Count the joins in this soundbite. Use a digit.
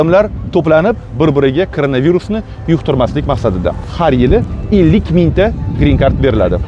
1